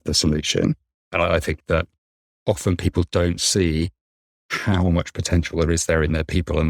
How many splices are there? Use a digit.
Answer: 1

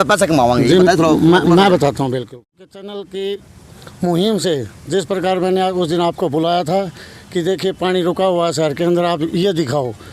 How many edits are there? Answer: 1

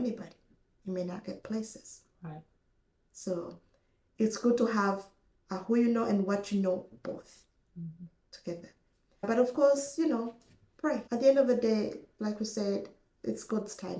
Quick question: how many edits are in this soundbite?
2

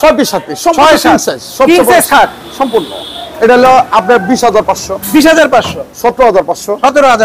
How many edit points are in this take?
0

